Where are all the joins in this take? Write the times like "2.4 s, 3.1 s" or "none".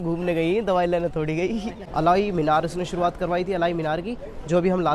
1.8 s